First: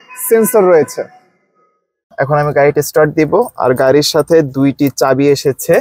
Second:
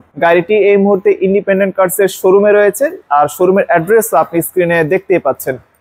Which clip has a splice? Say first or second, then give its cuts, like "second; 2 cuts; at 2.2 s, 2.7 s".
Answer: first; 1 cut; at 2.0 s